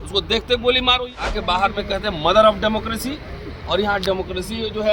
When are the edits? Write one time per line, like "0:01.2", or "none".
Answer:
0:01.1